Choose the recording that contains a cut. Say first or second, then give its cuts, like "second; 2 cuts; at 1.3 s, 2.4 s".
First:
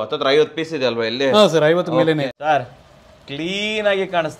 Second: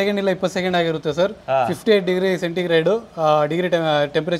first; 1 cut; at 2.2 s